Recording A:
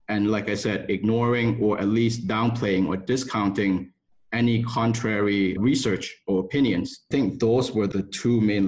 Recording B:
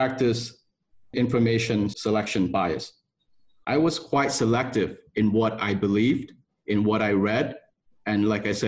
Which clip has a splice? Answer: A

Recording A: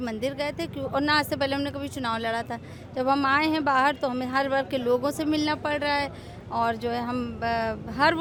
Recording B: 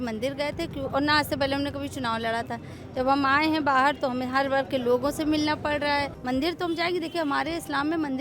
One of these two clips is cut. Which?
B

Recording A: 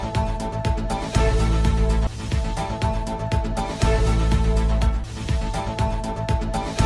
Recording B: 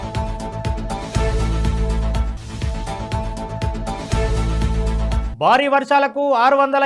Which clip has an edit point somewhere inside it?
B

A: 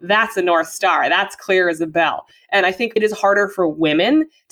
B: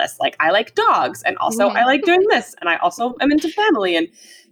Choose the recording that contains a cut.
A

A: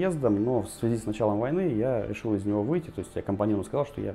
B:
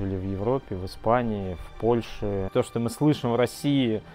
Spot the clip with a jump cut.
B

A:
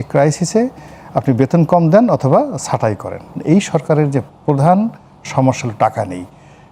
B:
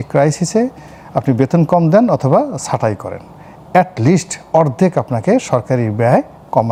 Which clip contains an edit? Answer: A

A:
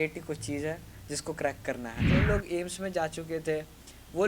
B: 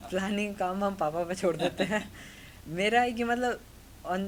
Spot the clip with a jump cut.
A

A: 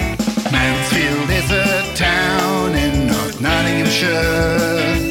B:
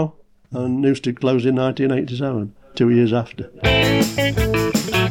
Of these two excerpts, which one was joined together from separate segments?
B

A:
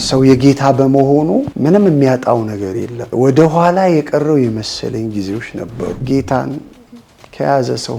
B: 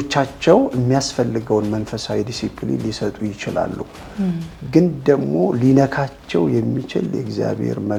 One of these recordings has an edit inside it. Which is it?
A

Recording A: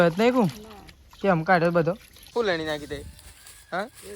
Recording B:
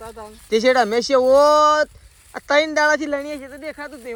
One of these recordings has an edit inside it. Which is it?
A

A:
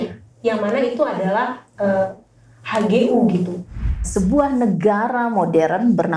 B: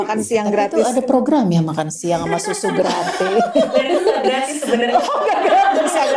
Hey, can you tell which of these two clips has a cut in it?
A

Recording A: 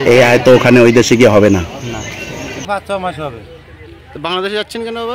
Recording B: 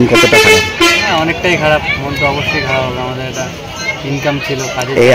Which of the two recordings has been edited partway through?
A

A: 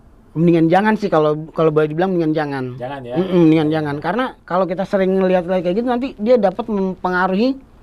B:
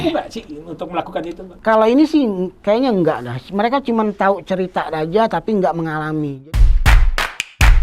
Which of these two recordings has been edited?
B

